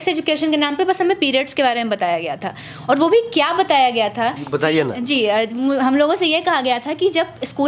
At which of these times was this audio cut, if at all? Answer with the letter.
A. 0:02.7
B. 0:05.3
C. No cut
C